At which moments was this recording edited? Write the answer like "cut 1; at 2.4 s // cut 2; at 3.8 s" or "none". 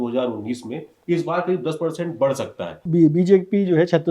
cut 1; at 2.8 s